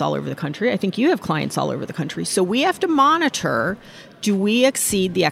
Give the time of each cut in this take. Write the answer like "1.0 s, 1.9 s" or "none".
none